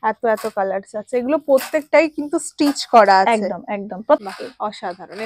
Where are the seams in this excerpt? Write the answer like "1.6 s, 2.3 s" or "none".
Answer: 4.3 s